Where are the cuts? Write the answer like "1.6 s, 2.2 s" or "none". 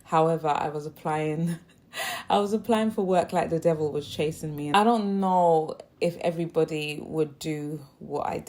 4.7 s